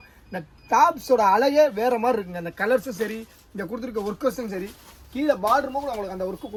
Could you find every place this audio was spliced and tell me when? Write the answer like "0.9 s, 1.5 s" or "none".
none